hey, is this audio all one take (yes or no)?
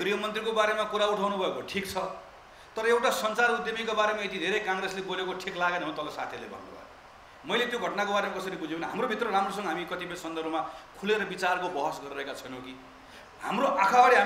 no